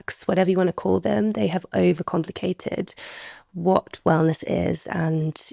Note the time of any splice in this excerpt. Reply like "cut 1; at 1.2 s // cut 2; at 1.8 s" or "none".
none